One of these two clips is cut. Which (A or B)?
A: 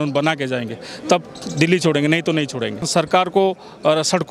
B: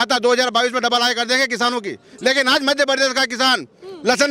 A